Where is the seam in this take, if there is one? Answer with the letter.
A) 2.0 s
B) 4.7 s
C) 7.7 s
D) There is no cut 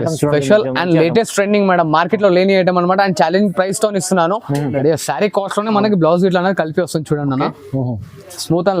B